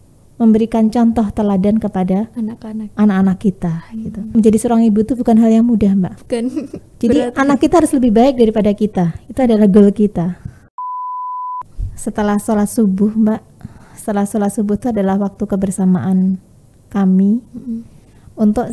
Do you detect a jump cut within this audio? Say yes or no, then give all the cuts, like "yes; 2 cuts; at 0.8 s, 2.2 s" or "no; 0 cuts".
yes; 2 cuts; at 4.3 s, 11.1 s